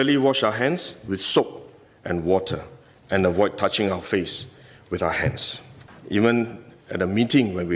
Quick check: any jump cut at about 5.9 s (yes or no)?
yes